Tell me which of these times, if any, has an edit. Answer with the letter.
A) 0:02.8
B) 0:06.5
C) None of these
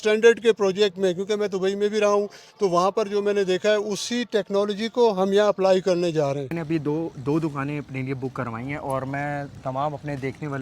B